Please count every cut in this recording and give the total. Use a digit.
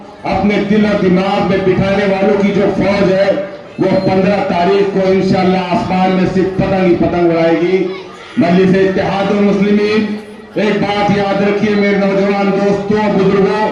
0